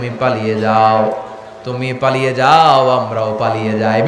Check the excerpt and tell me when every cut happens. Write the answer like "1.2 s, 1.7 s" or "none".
none